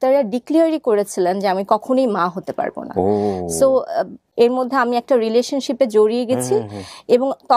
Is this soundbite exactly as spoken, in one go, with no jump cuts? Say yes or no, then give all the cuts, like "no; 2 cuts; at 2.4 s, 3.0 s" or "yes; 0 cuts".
no; 1 cut; at 4.2 s